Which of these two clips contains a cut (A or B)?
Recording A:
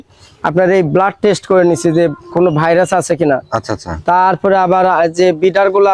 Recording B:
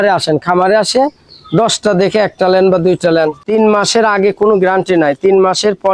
B